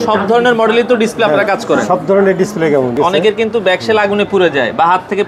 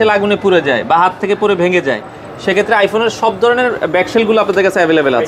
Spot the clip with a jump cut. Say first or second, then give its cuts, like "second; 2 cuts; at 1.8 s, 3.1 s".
first; 1 cut; at 3.0 s